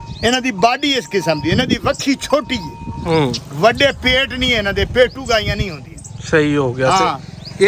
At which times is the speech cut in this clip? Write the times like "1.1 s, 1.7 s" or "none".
none

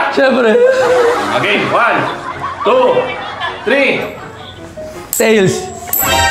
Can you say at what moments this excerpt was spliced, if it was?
none

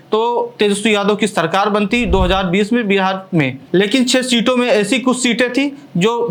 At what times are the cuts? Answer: none

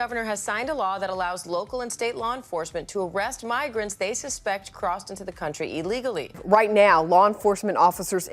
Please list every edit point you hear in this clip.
6.3 s

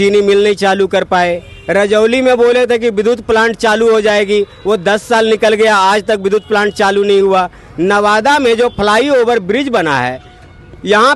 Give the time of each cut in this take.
none

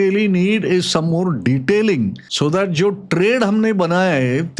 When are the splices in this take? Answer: 2.2 s

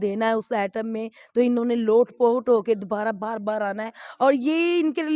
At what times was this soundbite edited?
none

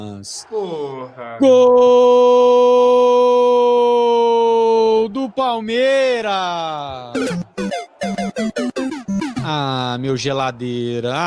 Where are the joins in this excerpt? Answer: none

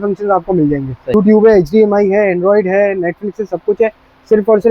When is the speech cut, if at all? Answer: 1.1 s

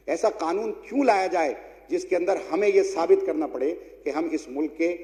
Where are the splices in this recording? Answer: none

